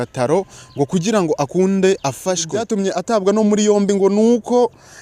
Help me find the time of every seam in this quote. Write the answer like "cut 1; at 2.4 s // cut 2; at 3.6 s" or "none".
cut 1; at 2.5 s